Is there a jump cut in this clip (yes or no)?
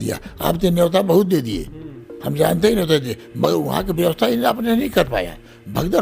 no